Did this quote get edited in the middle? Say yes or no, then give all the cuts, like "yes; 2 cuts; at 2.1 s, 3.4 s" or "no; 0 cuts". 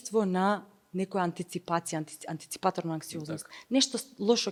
no; 0 cuts